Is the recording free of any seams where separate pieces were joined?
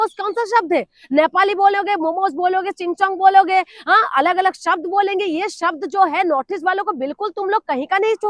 yes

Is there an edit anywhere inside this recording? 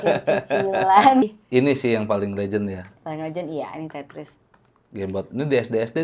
yes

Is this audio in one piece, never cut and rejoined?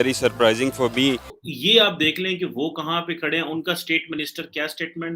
no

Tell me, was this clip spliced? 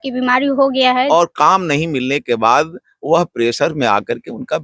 yes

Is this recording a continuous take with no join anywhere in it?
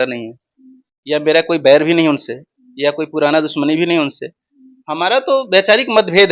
yes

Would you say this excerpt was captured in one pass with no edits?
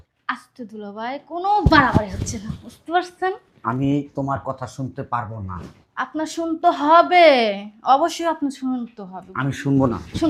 yes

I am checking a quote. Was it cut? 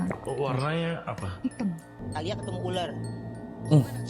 yes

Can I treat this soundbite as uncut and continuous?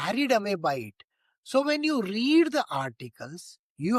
yes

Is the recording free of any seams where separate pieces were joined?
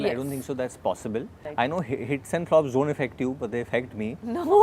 no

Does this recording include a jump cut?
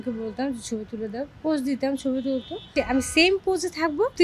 yes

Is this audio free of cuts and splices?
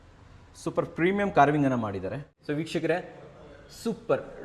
no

